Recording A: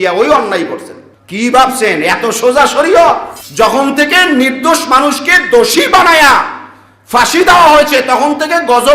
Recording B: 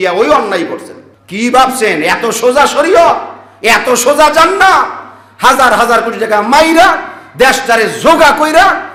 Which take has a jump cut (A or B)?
A